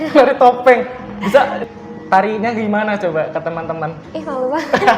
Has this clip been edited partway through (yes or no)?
yes